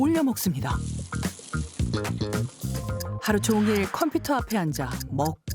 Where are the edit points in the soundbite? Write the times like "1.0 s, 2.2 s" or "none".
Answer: 2.9 s